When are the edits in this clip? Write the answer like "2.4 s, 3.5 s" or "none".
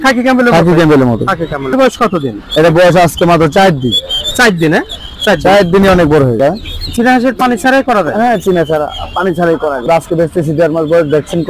1.7 s, 6.4 s, 9.8 s